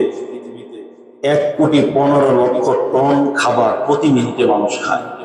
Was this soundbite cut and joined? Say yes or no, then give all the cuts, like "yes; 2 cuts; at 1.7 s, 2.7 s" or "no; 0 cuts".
no; 0 cuts